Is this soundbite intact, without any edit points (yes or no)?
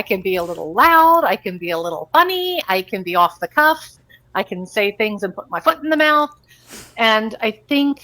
yes